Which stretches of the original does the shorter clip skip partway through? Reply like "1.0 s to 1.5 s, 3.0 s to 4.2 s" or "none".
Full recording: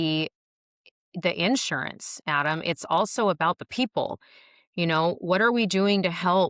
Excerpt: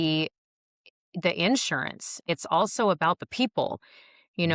2.2 s to 2.6 s